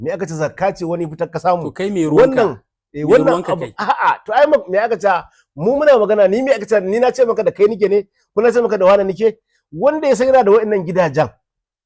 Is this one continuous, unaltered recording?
yes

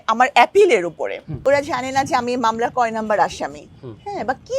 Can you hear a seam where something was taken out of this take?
yes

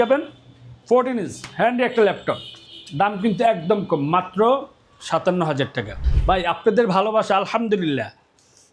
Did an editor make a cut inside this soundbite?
yes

